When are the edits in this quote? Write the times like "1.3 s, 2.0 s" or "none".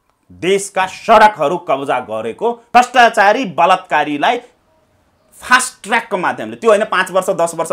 2.6 s